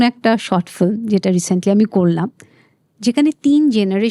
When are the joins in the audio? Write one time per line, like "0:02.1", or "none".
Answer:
none